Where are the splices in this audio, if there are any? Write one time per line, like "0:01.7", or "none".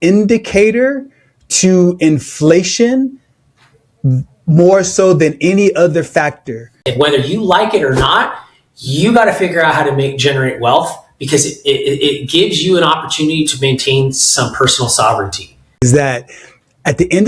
0:06.8
0:15.8